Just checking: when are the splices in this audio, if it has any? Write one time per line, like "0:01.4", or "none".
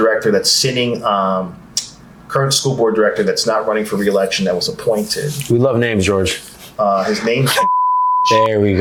none